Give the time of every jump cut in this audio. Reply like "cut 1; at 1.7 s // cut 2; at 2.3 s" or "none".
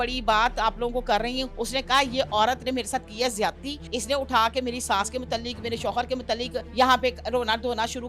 cut 1; at 1.5 s // cut 2; at 3.8 s // cut 3; at 6.6 s